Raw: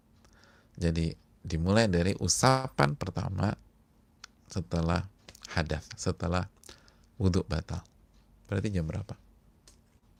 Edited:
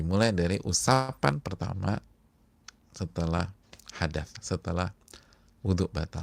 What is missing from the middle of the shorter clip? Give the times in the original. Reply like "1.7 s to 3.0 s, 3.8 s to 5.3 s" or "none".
none